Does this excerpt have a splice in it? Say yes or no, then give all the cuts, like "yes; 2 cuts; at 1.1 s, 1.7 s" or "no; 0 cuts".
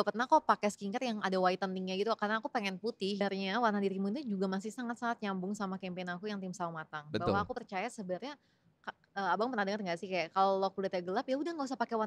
yes; 1 cut; at 3.2 s